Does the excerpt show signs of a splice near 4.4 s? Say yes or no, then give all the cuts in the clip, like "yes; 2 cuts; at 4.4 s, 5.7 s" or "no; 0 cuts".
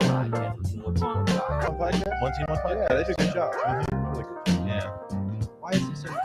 no; 1 cut; at 1.7 s